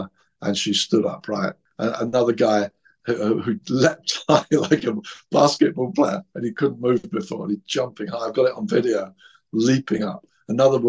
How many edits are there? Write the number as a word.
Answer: one